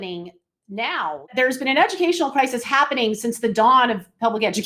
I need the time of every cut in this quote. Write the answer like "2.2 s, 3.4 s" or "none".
1.3 s